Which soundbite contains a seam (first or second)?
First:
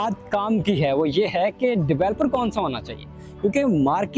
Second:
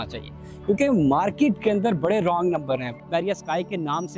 second